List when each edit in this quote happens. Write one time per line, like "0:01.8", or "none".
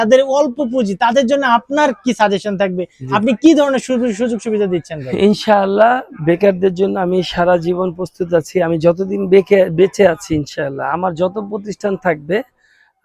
0:09.1